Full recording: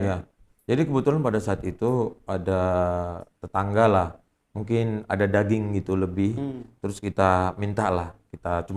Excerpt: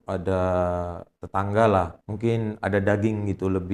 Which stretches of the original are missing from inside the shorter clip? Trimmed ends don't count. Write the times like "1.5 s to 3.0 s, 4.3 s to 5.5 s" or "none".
4.2 s to 4.5 s